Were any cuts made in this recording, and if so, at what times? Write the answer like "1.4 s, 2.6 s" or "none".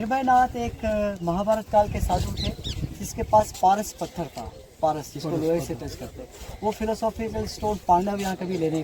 none